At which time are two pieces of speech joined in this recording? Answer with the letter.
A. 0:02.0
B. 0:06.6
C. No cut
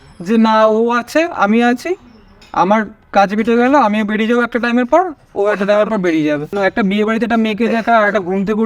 B